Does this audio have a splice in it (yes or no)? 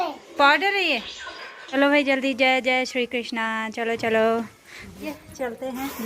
yes